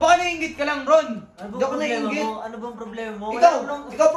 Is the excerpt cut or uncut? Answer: uncut